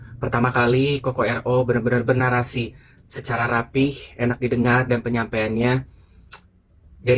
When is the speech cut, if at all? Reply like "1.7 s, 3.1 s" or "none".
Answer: none